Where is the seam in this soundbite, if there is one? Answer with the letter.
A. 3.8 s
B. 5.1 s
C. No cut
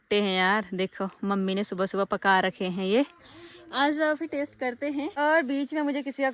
B